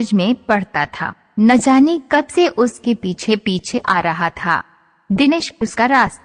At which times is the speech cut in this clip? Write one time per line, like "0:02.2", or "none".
0:03.4